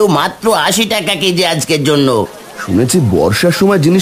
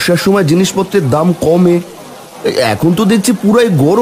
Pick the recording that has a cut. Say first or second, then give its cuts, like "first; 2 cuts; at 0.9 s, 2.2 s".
first; 1 cut; at 2.4 s